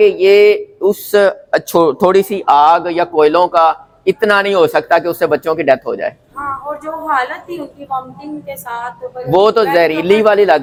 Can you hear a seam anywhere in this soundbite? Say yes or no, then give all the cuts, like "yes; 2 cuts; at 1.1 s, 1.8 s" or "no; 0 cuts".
no; 0 cuts